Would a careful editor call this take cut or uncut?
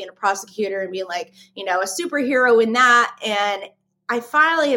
uncut